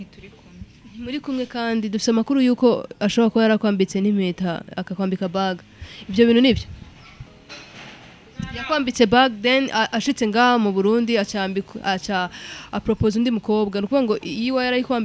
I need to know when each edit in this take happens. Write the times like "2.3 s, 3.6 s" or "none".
none